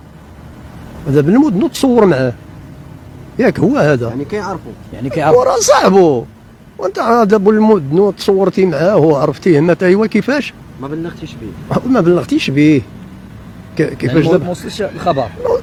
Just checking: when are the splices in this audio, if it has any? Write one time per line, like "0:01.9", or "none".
none